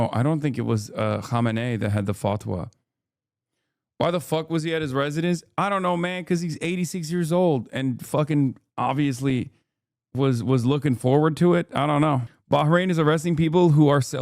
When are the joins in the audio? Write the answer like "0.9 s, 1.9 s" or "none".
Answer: none